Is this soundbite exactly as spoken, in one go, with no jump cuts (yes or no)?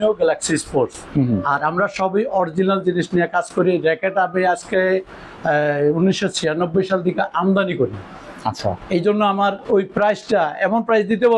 yes